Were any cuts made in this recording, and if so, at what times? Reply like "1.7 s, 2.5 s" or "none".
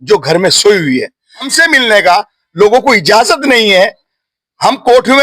1.5 s